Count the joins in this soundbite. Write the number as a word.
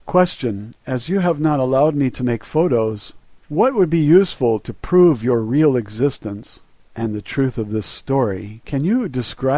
one